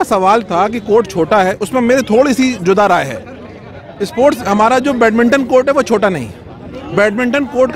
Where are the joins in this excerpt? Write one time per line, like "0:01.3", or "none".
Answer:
none